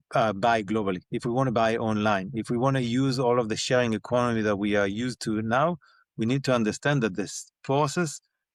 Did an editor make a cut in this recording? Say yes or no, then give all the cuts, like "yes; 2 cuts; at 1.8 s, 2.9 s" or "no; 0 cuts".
no; 0 cuts